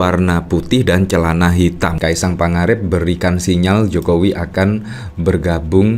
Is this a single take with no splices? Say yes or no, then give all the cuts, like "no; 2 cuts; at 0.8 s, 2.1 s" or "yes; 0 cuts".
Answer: no; 1 cut; at 2.0 s